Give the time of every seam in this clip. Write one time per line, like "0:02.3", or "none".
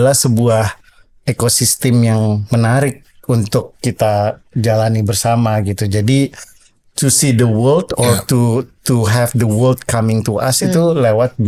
none